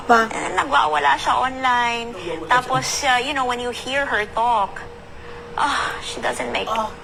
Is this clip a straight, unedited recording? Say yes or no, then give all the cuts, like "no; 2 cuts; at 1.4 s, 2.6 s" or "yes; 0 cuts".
yes; 0 cuts